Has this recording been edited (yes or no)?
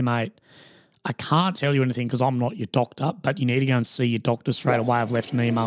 no